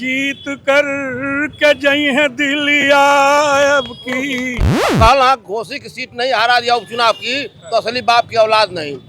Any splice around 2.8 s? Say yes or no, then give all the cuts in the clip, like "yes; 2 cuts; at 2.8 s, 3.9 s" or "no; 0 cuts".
no; 1 cut; at 4.8 s